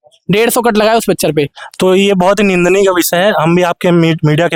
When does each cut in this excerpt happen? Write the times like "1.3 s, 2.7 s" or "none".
none